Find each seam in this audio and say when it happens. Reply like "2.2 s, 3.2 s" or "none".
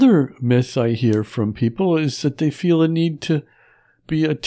none